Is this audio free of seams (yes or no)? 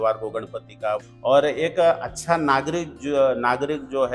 no